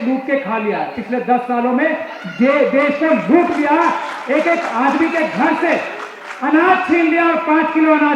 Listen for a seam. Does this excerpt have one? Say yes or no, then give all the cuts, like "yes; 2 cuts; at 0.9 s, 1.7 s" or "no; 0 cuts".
no; 0 cuts